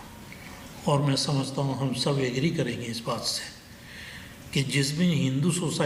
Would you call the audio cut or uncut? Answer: uncut